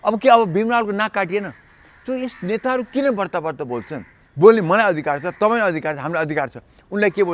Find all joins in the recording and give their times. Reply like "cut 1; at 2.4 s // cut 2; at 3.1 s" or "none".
cut 1; at 4.2 s